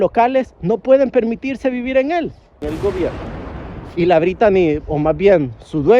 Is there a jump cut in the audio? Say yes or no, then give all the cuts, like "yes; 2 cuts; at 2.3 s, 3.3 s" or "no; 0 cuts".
yes; 1 cut; at 2.6 s